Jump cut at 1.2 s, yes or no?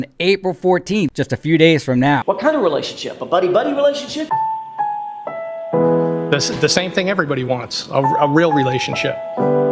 yes